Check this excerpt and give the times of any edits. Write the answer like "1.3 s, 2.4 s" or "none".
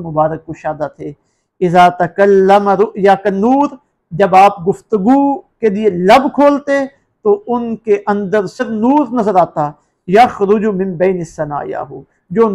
8.6 s